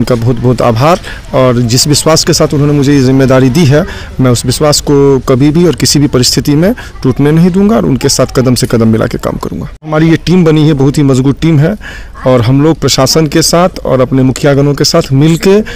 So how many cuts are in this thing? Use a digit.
1